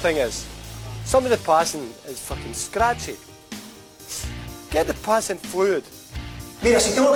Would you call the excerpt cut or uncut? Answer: uncut